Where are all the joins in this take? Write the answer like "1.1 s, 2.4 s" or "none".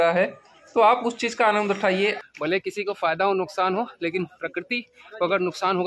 2.2 s